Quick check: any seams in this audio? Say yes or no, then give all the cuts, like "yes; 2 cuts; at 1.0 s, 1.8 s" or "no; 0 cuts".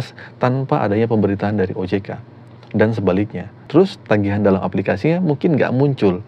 no; 0 cuts